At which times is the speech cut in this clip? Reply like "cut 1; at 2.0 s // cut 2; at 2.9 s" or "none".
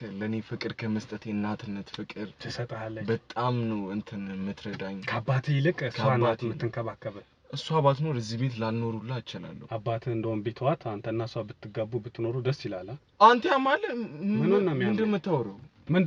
cut 1; at 9.5 s